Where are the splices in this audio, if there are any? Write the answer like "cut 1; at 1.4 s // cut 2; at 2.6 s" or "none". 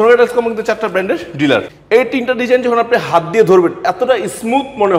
cut 1; at 1.7 s